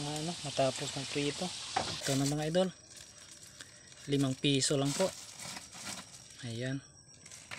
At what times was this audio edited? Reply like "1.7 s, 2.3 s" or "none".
2.0 s